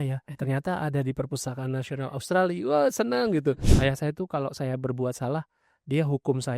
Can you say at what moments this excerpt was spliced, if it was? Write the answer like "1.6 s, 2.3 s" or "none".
3.7 s